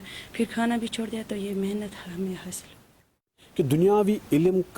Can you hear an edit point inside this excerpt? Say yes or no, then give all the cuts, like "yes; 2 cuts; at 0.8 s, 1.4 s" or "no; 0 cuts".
yes; 1 cut; at 3.4 s